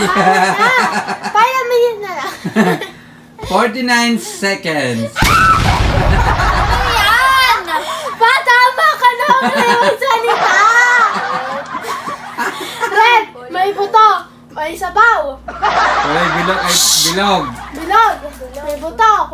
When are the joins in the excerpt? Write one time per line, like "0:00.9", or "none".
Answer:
0:15.5
0:16.3